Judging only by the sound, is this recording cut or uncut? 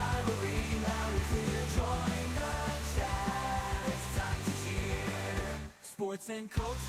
uncut